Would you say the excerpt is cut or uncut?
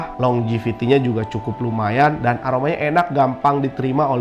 uncut